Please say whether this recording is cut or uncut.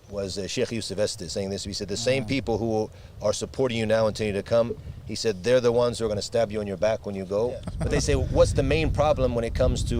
cut